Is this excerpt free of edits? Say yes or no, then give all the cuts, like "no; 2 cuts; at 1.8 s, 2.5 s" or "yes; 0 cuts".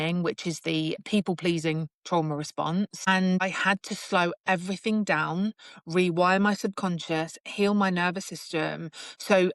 yes; 0 cuts